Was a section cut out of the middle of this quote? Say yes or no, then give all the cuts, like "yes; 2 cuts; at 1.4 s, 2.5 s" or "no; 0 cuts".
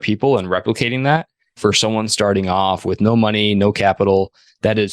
yes; 1 cut; at 1.6 s